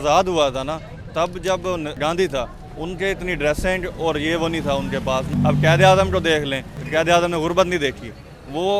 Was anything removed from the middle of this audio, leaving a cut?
yes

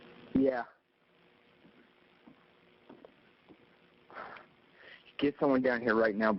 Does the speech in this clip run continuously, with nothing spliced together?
yes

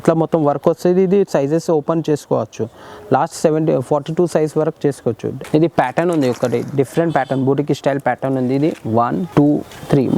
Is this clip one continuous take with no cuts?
no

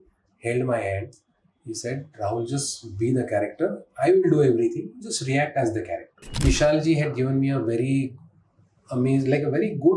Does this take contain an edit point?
yes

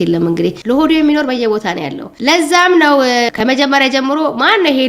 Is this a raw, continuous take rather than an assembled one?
yes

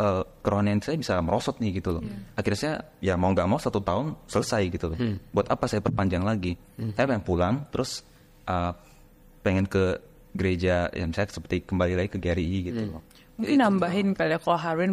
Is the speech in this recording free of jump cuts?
yes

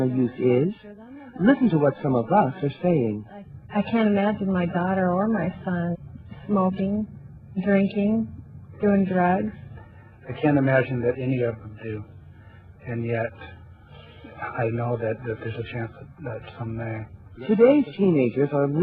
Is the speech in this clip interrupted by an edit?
no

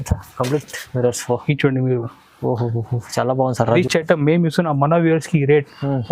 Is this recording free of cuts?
no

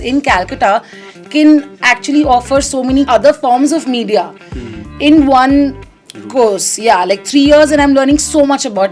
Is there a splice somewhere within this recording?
yes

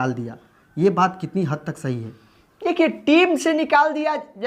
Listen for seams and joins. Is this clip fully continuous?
yes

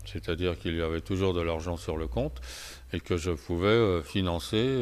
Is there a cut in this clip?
no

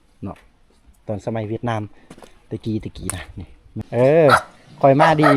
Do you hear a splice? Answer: yes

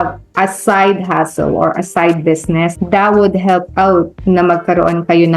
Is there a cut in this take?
yes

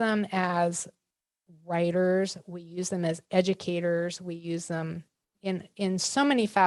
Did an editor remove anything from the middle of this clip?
no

